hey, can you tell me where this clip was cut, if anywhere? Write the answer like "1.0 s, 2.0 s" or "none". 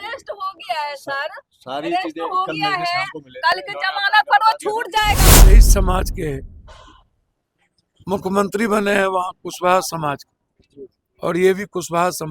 5.5 s